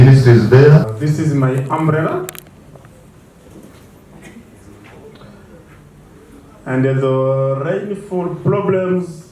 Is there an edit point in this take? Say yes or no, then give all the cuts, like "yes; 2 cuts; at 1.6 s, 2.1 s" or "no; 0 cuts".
yes; 1 cut; at 1.0 s